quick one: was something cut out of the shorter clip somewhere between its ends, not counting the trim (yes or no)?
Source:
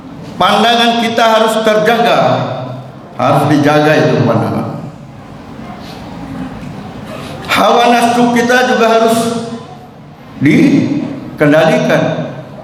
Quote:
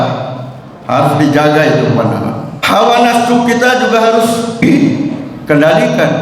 yes